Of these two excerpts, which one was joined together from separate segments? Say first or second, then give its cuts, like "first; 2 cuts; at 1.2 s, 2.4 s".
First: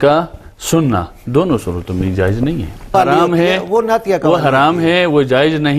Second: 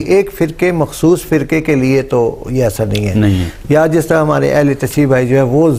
first; 1 cut; at 2.9 s